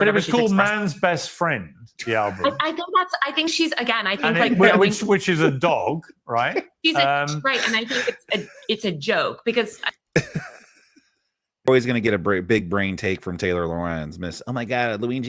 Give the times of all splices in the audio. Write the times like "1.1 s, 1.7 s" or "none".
11.7 s